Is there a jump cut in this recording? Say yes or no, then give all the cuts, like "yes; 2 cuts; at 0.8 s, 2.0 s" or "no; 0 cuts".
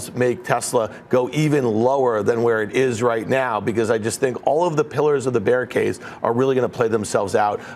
no; 0 cuts